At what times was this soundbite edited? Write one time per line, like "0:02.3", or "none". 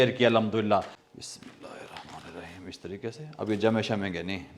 0:01.0